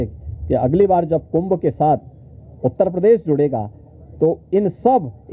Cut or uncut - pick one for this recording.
uncut